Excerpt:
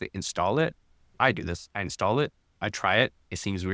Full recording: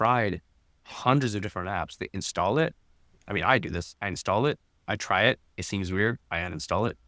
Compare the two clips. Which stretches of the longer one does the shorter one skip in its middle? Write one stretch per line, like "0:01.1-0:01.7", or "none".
0:03.1-0:03.4